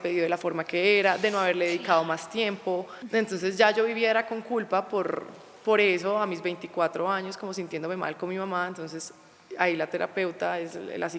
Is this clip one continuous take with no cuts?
no; 1 cut; at 3.0 s

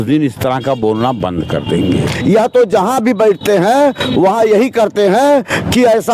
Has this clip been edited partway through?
yes; 1 cut; at 2.1 s

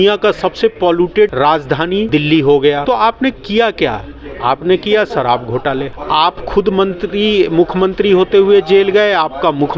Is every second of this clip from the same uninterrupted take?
yes; 0 cuts

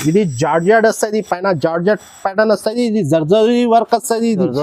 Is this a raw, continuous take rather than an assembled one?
yes; 0 cuts

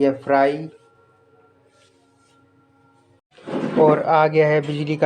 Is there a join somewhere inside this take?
yes; 1 cut; at 3.2 s

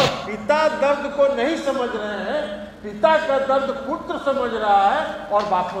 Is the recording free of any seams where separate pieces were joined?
yes; 0 cuts

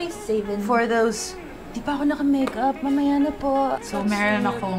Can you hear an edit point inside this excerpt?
yes; 1 cut; at 3.9 s

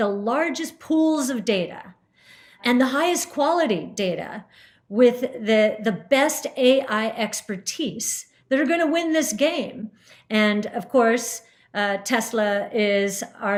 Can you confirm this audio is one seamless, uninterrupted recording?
yes; 0 cuts

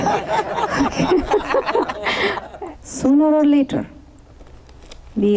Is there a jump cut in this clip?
yes; 1 cut; at 2.4 s

